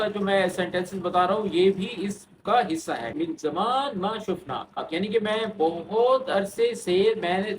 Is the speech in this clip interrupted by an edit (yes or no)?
yes